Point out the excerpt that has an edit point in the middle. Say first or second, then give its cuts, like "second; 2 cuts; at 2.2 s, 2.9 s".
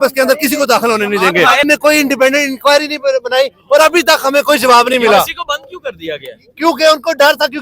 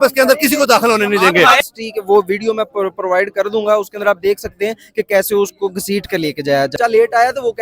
second; 2 cuts; at 1.6 s, 6.7 s